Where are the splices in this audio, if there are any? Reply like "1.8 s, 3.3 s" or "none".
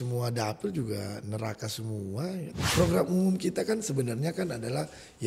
2.7 s